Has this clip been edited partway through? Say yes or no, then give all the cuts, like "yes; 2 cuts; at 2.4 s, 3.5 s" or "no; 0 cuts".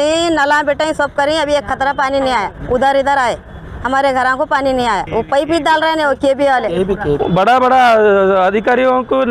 yes; 2 cuts; at 5.0 s, 7.2 s